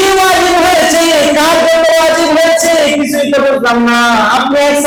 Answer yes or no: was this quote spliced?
no